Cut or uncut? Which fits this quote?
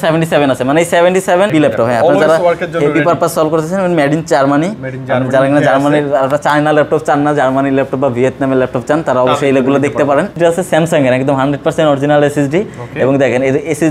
cut